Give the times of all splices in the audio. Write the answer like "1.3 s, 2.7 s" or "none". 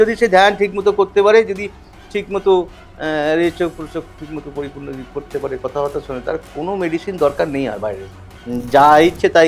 8.4 s